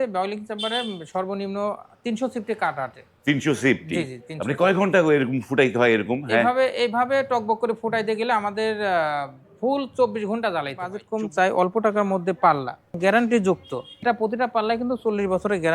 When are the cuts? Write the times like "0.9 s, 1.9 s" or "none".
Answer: 11.0 s, 13.0 s, 14.0 s